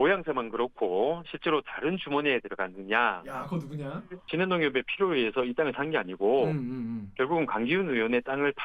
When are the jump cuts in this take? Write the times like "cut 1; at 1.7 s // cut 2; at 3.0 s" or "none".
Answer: cut 1; at 4.2 s